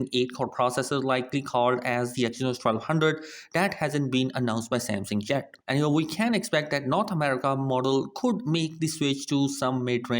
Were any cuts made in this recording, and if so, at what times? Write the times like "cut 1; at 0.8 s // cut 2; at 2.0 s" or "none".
cut 1; at 5.6 s